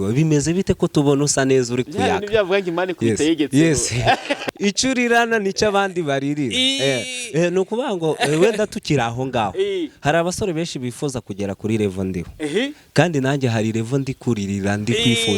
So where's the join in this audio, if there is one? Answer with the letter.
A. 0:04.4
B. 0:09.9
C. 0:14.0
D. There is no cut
A